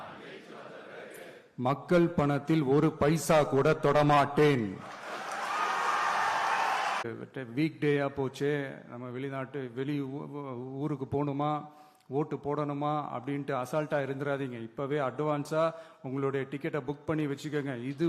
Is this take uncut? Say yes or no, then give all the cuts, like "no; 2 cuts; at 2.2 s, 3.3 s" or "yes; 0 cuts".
no; 1 cut; at 7.0 s